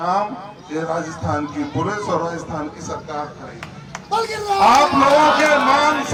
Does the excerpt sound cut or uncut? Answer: uncut